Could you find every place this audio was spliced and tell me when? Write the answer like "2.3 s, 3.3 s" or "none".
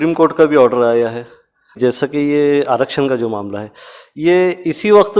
1.8 s